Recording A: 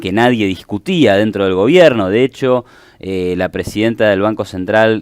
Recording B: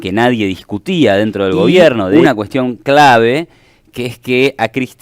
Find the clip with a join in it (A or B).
B